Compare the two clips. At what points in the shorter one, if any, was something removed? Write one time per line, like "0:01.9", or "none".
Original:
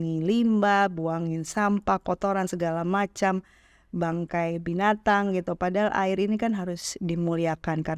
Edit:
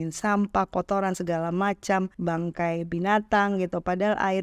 0:02.1